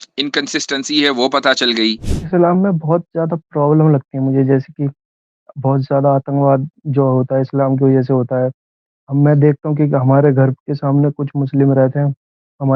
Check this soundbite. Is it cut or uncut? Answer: cut